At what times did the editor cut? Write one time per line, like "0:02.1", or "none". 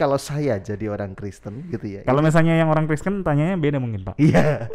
none